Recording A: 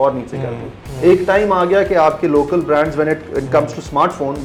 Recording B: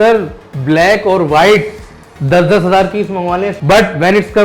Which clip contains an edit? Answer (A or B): B